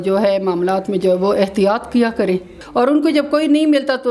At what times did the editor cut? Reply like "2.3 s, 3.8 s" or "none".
2.5 s